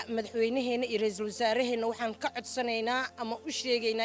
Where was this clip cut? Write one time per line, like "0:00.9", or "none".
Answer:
none